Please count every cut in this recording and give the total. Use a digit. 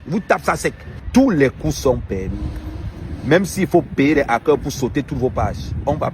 1